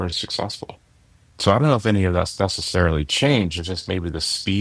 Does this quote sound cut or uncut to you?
uncut